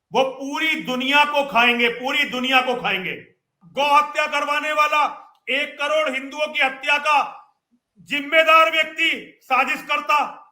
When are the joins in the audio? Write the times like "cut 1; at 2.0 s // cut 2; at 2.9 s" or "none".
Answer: cut 1; at 3.6 s